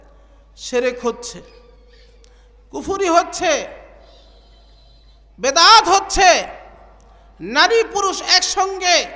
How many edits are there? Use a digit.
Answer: 0